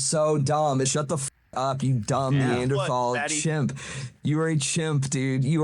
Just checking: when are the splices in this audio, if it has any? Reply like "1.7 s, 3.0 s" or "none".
0.9 s